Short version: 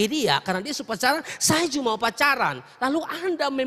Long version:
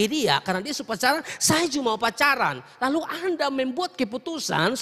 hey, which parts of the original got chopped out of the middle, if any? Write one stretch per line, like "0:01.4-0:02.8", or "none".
none